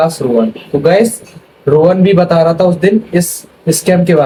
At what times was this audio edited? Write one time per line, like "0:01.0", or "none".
none